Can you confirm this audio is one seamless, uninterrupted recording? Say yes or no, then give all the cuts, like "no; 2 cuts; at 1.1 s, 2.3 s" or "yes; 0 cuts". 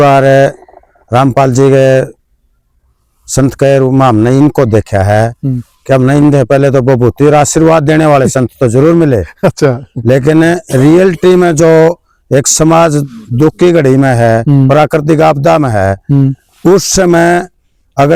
yes; 0 cuts